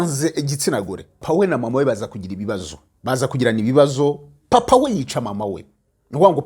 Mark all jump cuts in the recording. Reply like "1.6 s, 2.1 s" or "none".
1.2 s